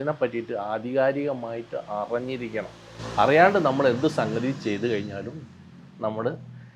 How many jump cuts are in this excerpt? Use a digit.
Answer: 0